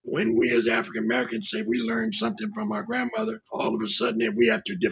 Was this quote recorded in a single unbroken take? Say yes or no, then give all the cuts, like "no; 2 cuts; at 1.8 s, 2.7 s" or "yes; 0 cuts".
no; 1 cut; at 3.4 s